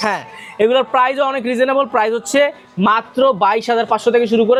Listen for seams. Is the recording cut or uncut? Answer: uncut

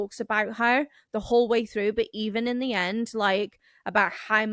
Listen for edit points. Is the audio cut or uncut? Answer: uncut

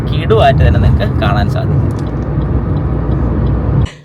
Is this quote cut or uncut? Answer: uncut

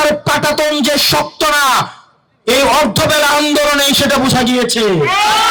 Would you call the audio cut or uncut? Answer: uncut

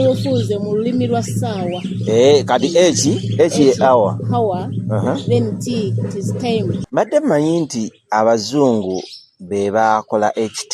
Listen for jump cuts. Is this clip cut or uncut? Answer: cut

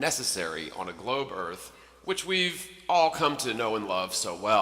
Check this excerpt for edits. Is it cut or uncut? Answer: cut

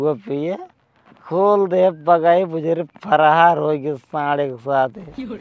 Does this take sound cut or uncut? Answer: uncut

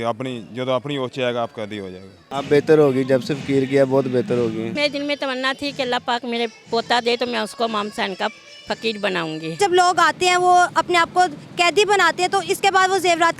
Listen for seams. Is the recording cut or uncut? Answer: cut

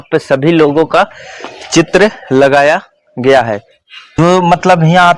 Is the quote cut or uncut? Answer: cut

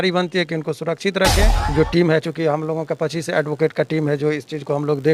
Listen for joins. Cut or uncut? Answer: cut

